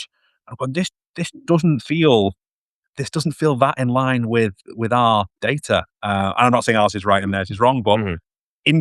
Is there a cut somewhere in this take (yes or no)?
no